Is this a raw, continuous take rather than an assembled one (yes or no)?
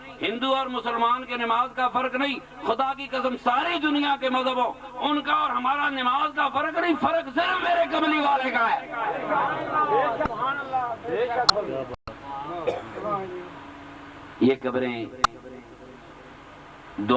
yes